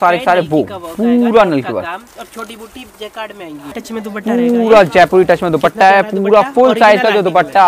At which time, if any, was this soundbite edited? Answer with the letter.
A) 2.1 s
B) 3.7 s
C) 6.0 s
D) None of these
B